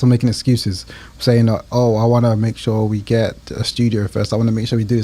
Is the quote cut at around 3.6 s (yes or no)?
no